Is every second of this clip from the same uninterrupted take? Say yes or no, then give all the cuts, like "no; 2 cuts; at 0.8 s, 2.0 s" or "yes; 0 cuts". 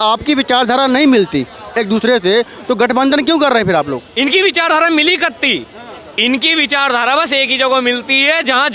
yes; 0 cuts